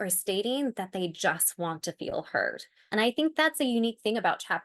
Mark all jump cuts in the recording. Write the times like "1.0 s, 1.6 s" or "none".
2.8 s

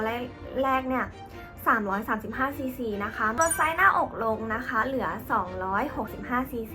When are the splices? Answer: 3.4 s

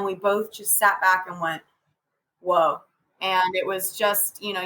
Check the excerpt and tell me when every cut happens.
2.9 s

